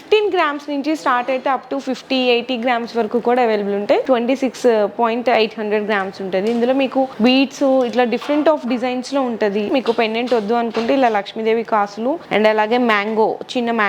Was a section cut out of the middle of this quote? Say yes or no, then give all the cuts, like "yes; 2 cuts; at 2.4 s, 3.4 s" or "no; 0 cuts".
yes; 4 cuts; at 4.1 s, 7.1 s, 9.7 s, 12.2 s